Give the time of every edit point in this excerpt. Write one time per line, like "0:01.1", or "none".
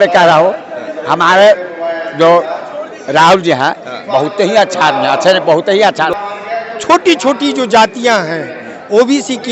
0:06.2

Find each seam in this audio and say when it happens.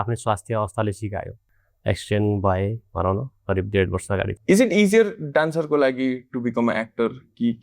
0:01.4
0:04.4

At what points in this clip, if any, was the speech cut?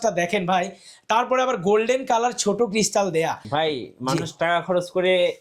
0:03.4

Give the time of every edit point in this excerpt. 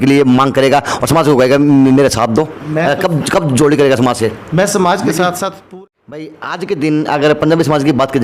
0:05.6

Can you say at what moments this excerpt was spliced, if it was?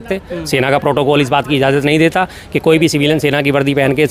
none

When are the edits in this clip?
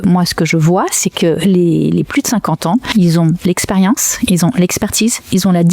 0:02.9

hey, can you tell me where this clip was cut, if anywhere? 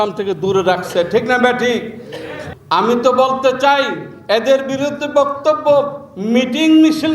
0:02.5

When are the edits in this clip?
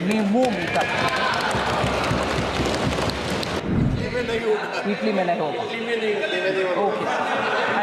0:03.6

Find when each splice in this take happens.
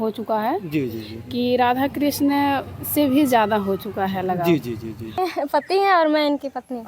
0:05.2

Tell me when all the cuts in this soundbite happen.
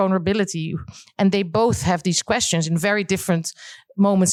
none

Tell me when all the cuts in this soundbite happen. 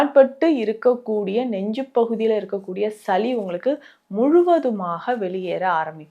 none

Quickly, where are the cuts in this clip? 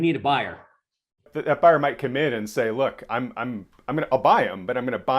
0:01.3

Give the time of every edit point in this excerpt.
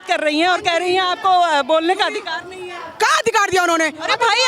none

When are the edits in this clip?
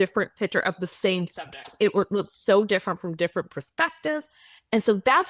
0:03.6

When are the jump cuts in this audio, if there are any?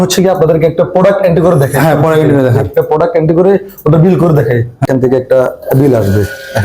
0:04.9

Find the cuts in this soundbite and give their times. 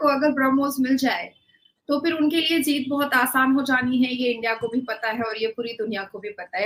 none

